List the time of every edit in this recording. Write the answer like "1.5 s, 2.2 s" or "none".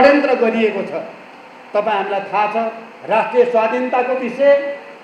none